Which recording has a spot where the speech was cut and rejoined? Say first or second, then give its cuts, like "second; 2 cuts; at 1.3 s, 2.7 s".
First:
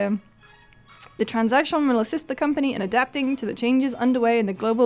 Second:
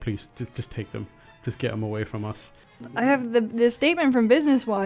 second; 1 cut; at 2.9 s